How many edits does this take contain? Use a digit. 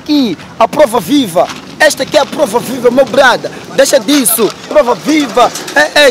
0